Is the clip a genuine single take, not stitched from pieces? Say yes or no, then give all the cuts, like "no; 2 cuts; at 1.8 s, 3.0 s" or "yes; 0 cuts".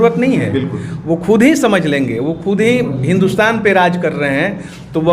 yes; 0 cuts